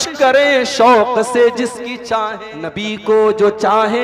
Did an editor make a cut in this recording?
yes; 1 cut; at 2.8 s

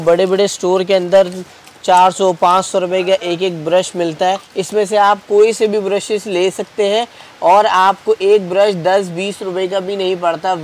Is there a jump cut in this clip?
yes; 1 cut; at 4.5 s

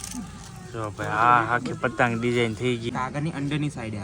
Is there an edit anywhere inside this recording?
yes; 1 cut; at 2.9 s

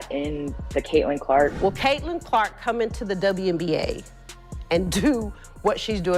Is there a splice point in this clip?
yes; 1 cut; at 1.5 s

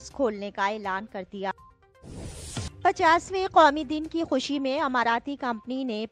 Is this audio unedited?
no; 1 cut; at 1.7 s

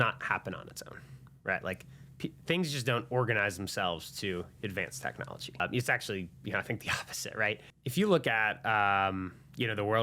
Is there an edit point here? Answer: yes; 2 cuts; at 5.6 s, 7.7 s

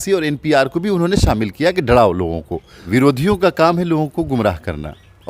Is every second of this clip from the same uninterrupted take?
no; 1 cut; at 2.8 s

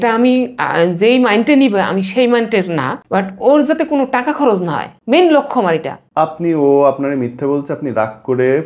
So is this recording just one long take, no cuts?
no; 3 cuts; at 3.0 s, 4.9 s, 6.0 s

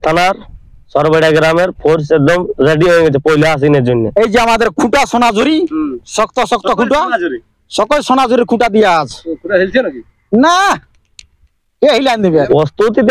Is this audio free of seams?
no; 2 cuts; at 4.0 s, 12.3 s

